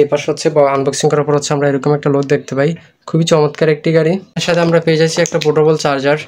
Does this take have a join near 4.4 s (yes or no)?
yes